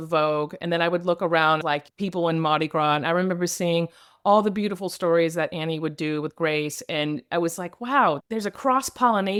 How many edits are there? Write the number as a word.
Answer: zero